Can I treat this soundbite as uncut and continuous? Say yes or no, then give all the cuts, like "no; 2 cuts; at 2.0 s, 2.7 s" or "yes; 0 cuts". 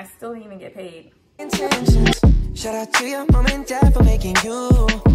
no; 1 cut; at 1.3 s